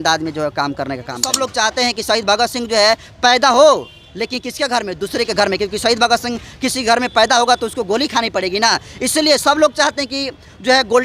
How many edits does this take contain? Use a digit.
1